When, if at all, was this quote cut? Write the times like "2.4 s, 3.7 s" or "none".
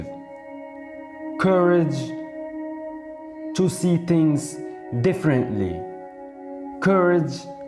2.0 s, 3.6 s